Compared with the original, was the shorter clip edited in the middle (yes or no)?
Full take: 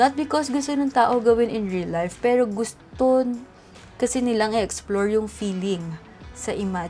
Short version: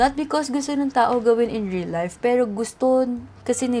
yes